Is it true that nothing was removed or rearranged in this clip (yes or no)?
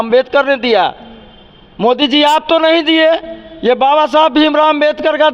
yes